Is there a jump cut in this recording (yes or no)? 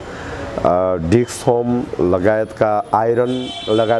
no